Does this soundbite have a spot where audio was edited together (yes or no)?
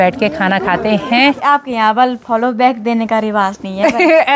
yes